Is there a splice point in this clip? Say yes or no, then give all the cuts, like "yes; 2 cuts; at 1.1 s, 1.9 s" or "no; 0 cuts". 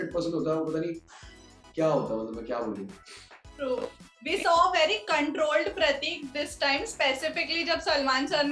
no; 0 cuts